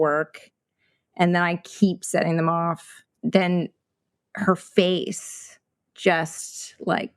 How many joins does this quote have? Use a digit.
1